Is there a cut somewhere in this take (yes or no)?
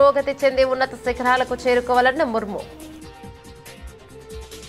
no